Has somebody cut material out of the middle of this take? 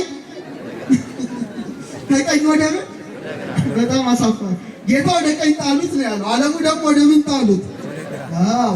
no; 0 cuts

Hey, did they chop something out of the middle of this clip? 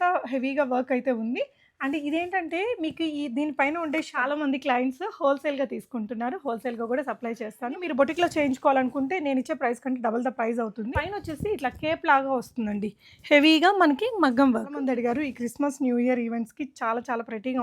yes; 4 cuts; at 4.2 s, 7.8 s, 11.1 s, 14.8 s

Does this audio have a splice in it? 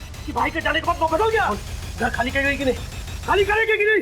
yes; 1 cut; at 1.5 s

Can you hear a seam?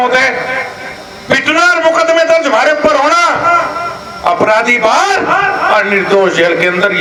no; 0 cuts

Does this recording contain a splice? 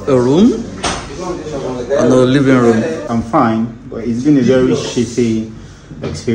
yes; 1 cut; at 3.0 s

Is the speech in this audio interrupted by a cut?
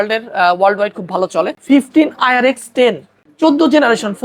yes; 2 cuts; at 1.6 s, 3.1 s

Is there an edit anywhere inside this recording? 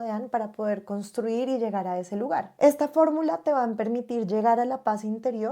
yes; 2 cuts; at 2.5 s, 3.7 s

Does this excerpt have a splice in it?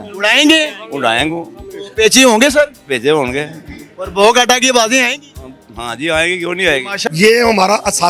yes; 1 cut; at 6.9 s

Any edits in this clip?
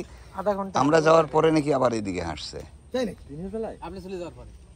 no; 0 cuts

